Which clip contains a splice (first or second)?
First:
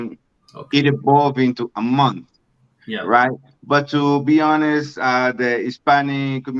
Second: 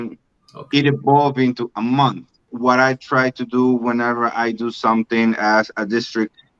second